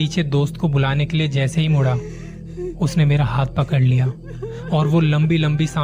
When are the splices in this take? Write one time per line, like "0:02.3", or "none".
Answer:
none

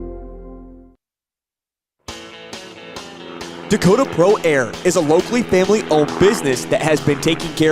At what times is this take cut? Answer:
0:01.5

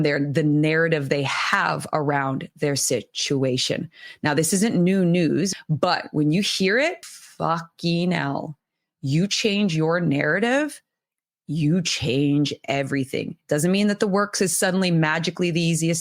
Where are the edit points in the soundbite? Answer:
0:05.5
0:07.0

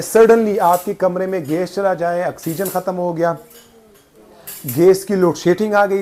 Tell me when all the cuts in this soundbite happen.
none

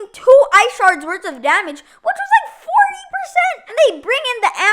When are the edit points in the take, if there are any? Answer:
0:03.6

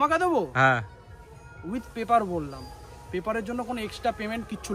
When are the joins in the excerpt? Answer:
none

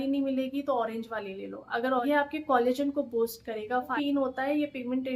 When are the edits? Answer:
0:02.0
0:03.9

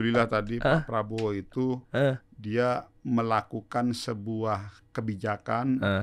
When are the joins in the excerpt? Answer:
none

